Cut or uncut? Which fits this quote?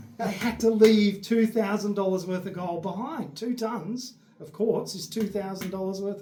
uncut